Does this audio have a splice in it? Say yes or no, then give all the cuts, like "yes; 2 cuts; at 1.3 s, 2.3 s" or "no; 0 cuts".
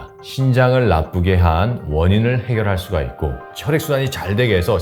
yes; 1 cut; at 3.4 s